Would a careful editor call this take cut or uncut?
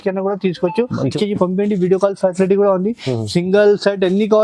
cut